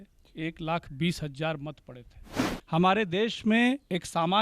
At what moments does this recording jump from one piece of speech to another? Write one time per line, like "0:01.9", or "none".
0:02.4